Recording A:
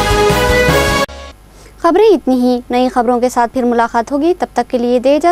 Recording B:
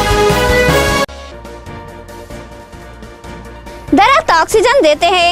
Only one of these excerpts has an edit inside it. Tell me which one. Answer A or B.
B